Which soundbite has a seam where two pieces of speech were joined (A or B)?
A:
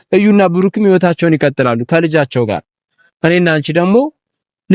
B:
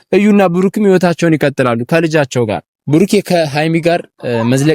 B